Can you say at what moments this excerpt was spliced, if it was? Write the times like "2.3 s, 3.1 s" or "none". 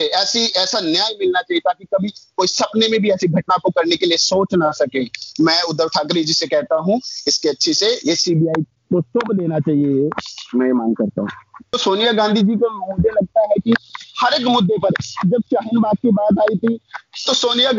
11.8 s

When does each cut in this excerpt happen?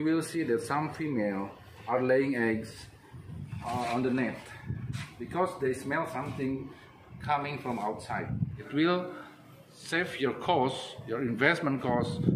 8.6 s

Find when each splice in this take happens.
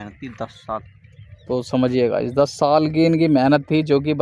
none

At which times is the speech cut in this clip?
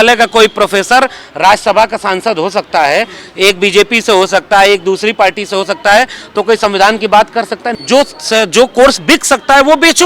7.7 s

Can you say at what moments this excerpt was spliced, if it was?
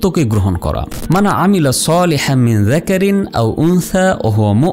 0.9 s

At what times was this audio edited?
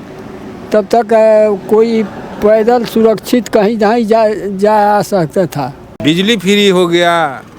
6.0 s

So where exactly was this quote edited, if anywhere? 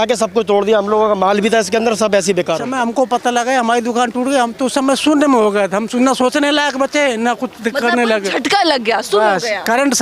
2.7 s

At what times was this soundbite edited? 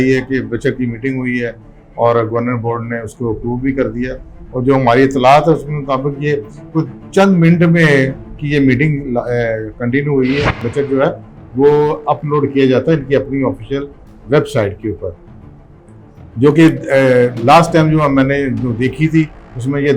10.6 s

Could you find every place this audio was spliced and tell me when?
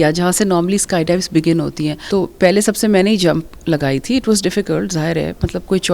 2.0 s

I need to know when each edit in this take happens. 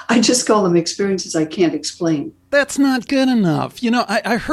2.5 s

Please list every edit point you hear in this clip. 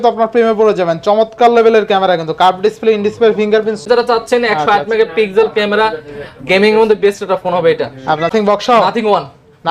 3.8 s, 8.3 s

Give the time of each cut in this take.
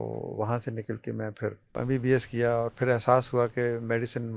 1.8 s

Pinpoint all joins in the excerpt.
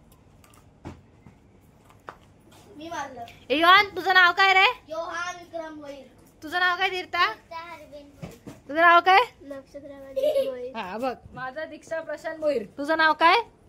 none

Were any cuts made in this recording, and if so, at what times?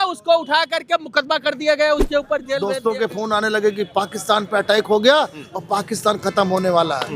2.6 s

